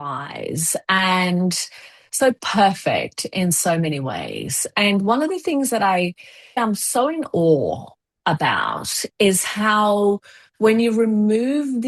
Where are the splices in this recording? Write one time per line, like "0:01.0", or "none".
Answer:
none